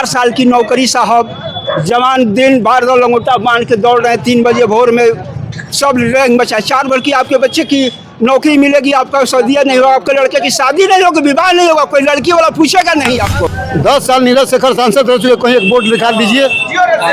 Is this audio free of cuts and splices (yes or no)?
no